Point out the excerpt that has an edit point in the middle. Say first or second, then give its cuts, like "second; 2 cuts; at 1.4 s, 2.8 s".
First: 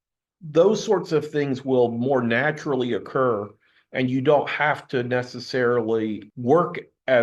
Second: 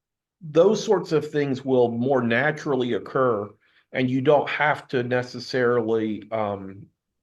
first; 1 cut; at 6.2 s